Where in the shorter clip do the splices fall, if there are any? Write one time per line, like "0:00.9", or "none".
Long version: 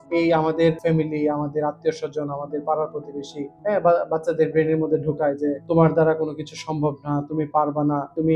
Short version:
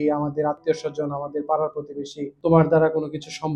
0:02.4

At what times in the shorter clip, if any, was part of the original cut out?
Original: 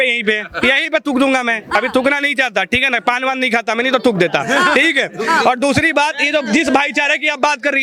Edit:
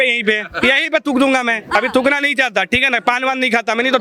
none

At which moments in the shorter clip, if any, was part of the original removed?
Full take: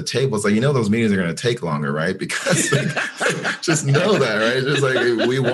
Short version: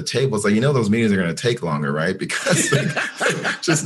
none

